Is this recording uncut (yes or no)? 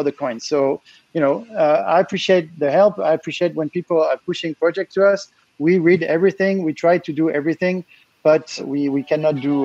no